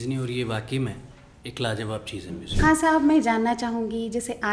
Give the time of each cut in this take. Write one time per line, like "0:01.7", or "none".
0:02.4